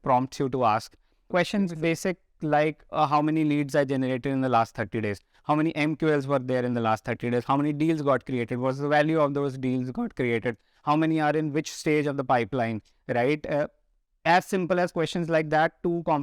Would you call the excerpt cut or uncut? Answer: cut